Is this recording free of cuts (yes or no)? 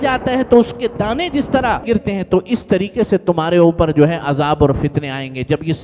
no